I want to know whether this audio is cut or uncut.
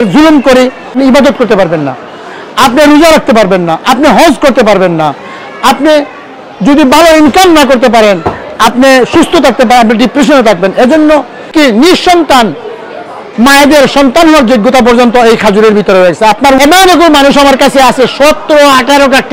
cut